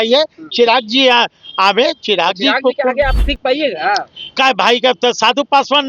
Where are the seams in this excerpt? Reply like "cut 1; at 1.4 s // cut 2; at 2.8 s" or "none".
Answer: cut 1; at 3.2 s